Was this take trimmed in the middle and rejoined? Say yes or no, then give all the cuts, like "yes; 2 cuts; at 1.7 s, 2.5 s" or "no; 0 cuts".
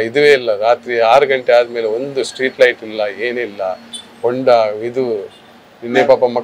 no; 0 cuts